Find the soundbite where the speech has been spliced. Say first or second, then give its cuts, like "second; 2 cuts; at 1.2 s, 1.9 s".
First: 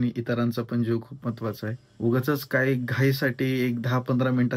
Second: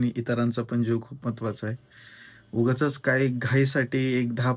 first; 1 cut; at 1.8 s